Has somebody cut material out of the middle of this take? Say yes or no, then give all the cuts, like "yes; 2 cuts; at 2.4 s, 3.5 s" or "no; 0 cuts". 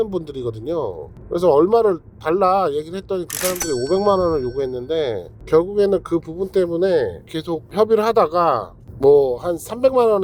no; 0 cuts